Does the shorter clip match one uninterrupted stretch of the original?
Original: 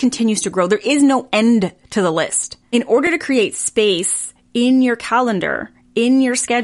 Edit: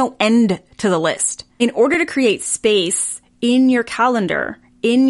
yes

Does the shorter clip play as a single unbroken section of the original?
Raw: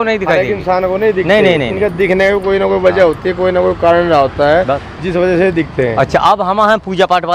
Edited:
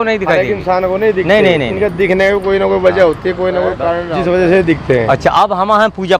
no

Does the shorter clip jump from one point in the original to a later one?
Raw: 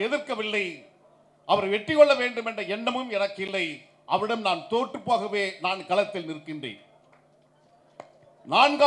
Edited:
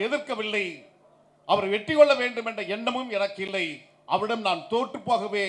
no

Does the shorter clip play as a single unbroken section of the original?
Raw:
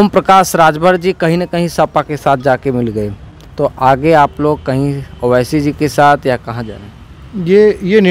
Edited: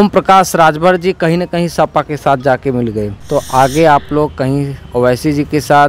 no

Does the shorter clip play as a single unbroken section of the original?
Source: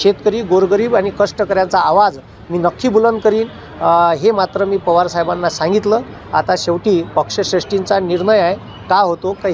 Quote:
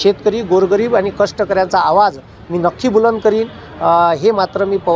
yes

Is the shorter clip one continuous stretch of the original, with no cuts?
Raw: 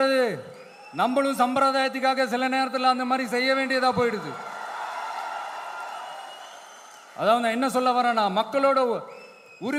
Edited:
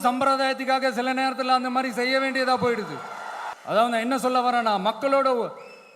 no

